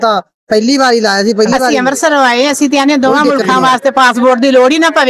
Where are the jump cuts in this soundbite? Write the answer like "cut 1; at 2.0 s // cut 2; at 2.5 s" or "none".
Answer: cut 1; at 1.7 s

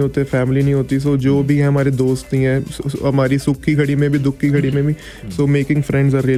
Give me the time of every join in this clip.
none

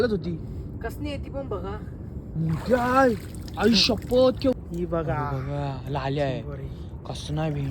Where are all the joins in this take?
cut 1; at 4.5 s

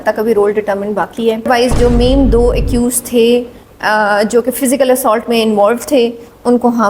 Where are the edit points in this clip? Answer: cut 1; at 1.5 s

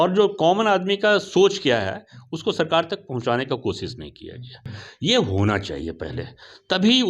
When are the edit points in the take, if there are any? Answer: cut 1; at 4.6 s

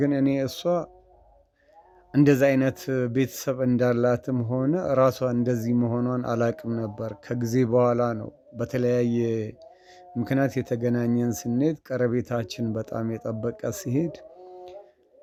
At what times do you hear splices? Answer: none

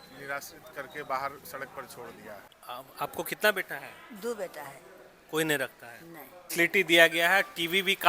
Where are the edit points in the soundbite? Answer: cut 1; at 2.9 s // cut 2; at 6.5 s

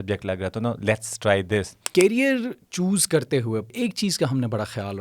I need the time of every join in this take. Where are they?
cut 1; at 1.8 s // cut 2; at 3.7 s

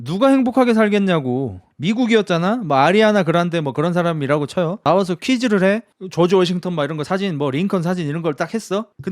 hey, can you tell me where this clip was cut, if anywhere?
cut 1; at 1.6 s

